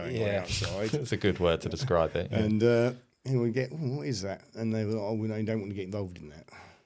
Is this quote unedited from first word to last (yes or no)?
yes